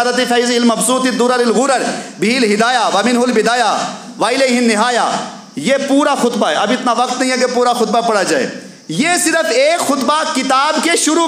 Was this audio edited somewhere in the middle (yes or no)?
no